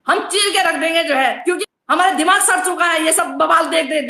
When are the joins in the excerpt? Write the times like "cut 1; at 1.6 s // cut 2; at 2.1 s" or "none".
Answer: cut 1; at 1.6 s